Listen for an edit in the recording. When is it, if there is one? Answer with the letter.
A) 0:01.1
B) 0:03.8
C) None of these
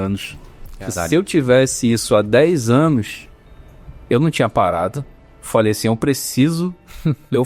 C